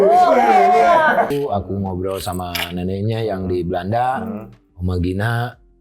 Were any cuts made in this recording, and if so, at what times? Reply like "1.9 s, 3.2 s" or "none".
1.3 s